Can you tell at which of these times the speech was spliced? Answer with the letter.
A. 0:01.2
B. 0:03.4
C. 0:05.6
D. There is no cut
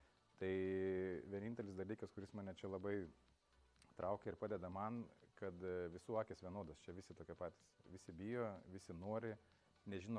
D